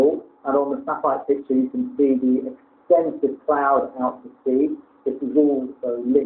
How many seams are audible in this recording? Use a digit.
2